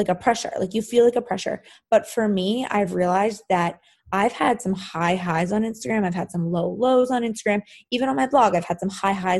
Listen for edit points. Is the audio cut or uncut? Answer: uncut